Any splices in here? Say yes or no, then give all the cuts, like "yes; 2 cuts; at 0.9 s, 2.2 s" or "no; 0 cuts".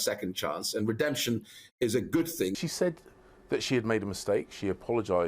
yes; 1 cut; at 2.6 s